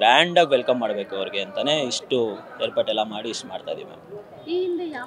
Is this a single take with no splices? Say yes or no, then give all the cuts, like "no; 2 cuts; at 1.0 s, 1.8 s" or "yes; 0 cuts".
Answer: yes; 0 cuts